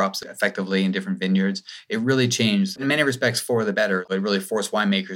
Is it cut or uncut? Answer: cut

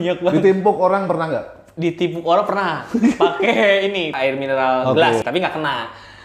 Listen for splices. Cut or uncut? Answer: cut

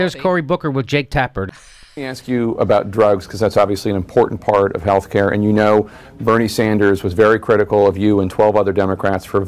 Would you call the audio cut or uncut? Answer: cut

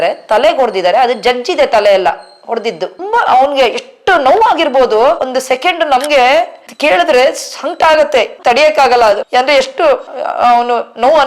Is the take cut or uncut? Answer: cut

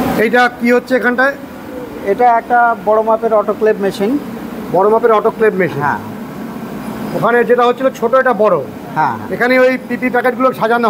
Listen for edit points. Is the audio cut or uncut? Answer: uncut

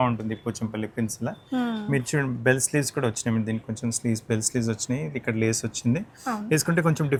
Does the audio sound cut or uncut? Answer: uncut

